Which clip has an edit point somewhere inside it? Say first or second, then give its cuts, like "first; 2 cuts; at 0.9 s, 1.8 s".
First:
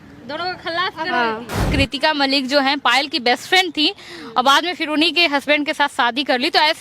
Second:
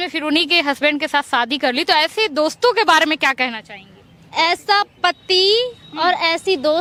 first; 1 cut; at 1.7 s